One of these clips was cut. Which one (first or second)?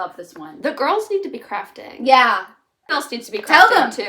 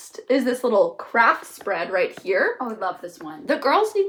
first